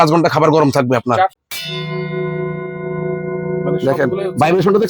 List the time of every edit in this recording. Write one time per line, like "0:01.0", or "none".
0:01.4